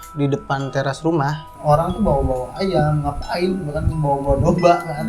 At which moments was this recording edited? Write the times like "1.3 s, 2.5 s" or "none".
1.5 s